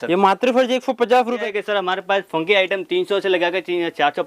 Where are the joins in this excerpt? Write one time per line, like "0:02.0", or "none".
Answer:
0:01.4